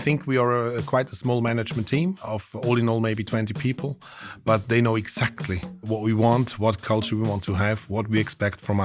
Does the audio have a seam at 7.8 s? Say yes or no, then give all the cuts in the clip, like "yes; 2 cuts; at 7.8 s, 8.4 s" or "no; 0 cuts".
no; 2 cuts; at 2.2 s, 5.8 s